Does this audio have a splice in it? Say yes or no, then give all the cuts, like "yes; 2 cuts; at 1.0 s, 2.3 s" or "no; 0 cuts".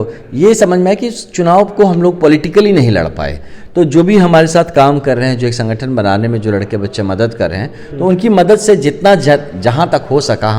no; 0 cuts